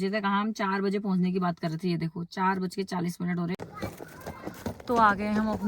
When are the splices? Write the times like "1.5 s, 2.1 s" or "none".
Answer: 3.6 s